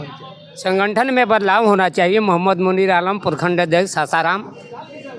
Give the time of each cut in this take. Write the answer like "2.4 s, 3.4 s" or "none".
none